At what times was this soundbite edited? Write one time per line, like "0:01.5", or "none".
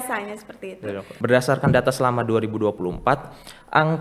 0:01.1